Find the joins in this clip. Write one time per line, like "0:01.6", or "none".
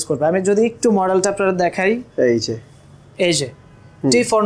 none